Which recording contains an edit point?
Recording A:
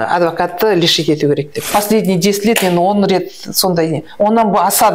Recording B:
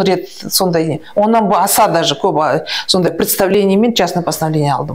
A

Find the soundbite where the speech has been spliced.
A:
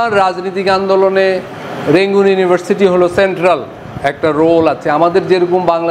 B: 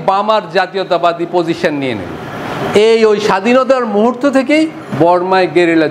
B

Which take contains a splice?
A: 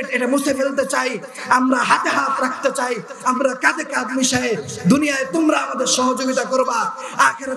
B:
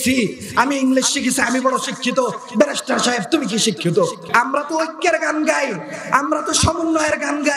B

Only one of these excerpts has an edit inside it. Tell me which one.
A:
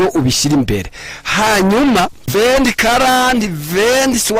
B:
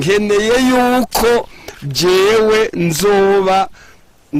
A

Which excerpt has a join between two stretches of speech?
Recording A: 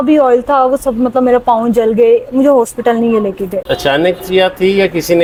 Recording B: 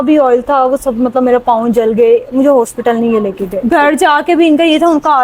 B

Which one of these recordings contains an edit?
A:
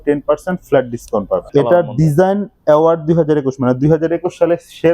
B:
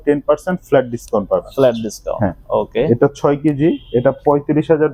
A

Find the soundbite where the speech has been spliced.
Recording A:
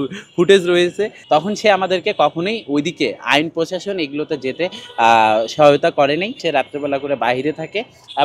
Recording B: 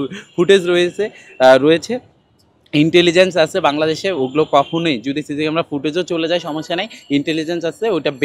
A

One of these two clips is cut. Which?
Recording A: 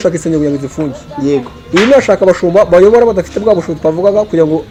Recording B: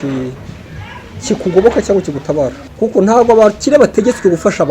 B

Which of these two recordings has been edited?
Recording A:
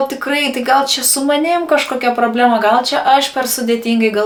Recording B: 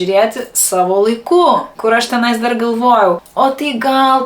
B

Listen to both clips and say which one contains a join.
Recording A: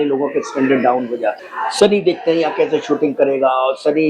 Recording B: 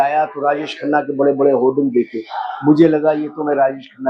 A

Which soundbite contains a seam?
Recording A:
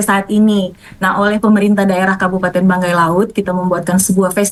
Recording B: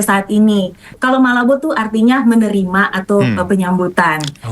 B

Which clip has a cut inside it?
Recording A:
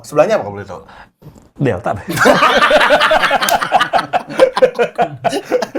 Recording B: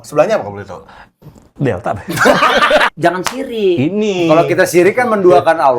B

